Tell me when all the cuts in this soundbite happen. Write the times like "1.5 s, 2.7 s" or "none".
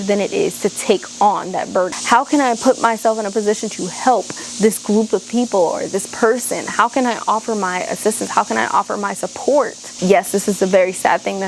2.0 s, 9.8 s